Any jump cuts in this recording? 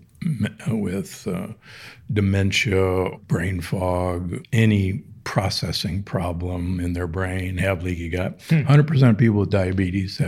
yes; 2 cuts; at 3.2 s, 4.4 s

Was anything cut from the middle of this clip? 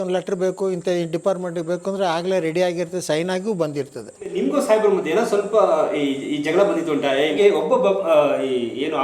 yes; 2 cuts; at 4.3 s, 7.3 s

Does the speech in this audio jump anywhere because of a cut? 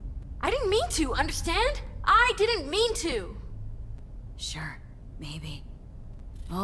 no; 0 cuts

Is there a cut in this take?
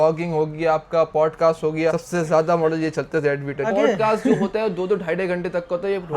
yes; 1 cut; at 3.7 s

